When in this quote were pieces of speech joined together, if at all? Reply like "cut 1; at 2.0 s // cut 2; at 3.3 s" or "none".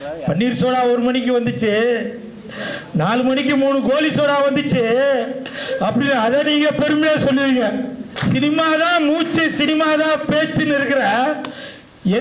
cut 1; at 8.1 s